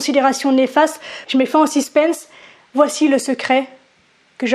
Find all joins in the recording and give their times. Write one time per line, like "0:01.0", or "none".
0:01.1